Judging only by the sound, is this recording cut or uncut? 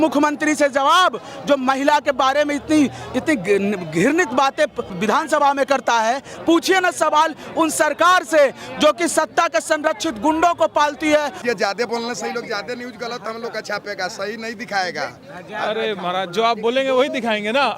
cut